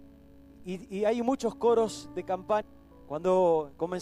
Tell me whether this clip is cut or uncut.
uncut